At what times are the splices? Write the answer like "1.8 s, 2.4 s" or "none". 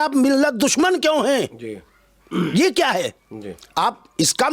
none